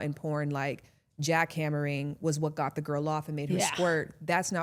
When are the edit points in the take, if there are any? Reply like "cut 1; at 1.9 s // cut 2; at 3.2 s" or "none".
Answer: none